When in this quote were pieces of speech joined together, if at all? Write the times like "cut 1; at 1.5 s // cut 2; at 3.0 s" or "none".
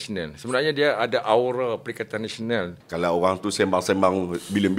cut 1; at 2.8 s